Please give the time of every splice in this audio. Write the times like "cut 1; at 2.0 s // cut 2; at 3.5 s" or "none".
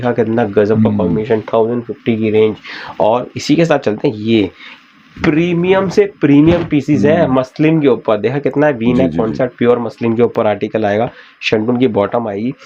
none